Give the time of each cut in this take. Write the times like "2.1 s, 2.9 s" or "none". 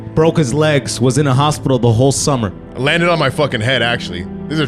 none